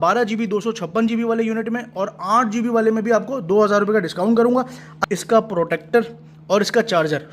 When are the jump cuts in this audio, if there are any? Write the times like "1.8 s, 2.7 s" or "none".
5.0 s